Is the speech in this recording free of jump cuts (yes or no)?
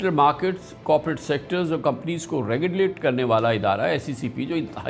yes